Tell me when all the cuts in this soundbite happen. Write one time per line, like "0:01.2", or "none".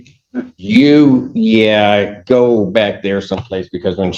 none